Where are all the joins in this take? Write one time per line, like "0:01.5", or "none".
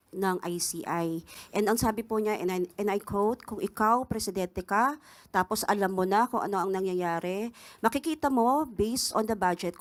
none